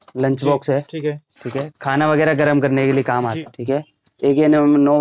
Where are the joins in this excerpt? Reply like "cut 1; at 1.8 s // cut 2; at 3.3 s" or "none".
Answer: cut 1; at 3.4 s